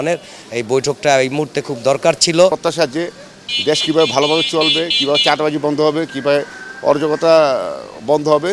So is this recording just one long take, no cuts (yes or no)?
no